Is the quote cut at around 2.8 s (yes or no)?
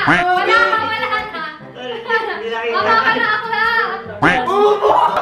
no